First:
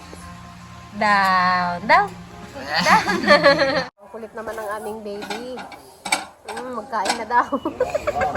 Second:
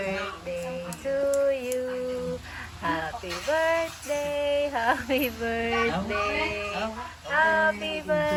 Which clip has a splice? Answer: first; 1 cut; at 4.0 s

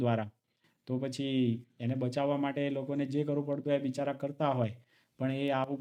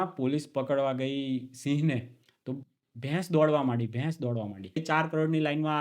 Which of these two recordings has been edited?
second; 1 cut; at 4.8 s

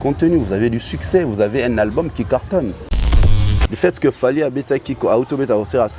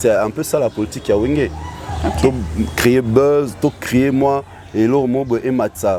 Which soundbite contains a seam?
first; 1 cut; at 3.3 s

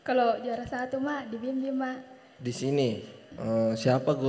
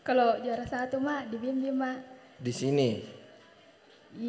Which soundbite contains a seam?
first; 1 cut; at 3.4 s

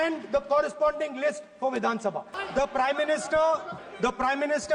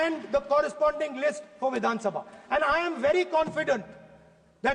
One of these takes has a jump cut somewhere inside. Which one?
first; 2 cuts; at 2.3 s, 3.8 s

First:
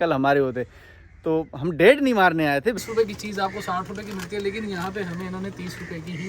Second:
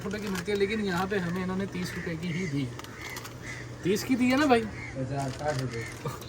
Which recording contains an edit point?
first; 1 cut; at 2.7 s

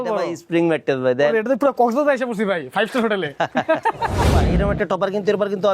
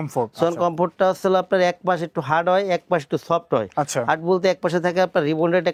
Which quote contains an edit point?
first; 2 cuts; at 1.3 s, 4.5 s

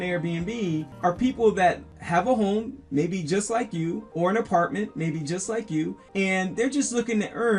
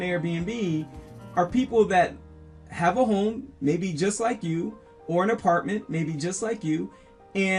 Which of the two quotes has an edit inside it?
first; 4 cuts; at 0.9 s, 1.9 s, 4.1 s, 6.0 s

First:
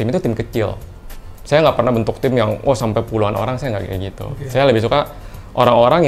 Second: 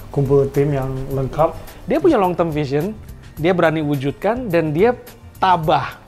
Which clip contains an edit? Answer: second; 1 cut; at 1.7 s

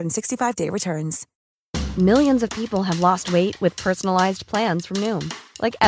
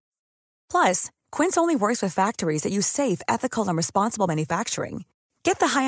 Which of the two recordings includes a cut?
first; 1 cut; at 1.3 s

